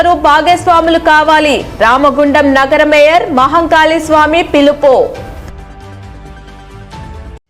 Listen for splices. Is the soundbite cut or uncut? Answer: uncut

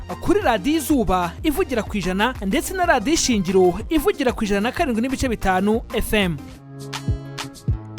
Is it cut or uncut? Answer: cut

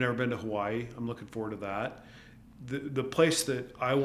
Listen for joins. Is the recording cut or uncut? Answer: uncut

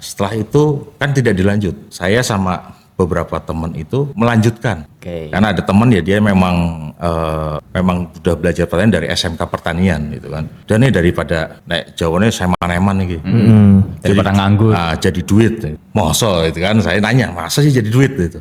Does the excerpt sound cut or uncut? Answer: uncut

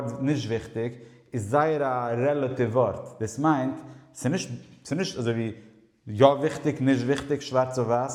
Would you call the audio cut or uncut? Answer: uncut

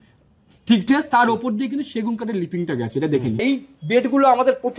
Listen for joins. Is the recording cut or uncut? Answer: cut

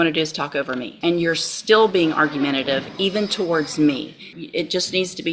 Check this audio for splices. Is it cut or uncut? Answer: cut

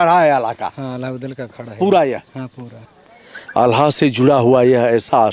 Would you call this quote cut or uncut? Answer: cut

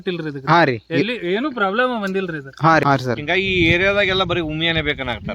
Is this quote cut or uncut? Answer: cut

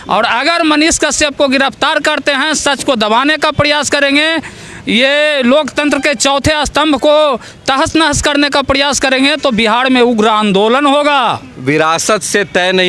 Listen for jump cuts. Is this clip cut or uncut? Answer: cut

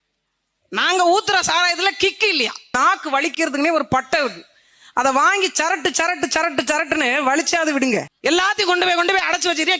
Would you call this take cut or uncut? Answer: cut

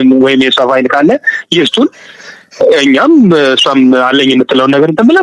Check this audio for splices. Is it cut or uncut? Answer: uncut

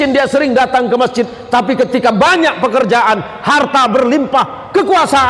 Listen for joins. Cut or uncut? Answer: uncut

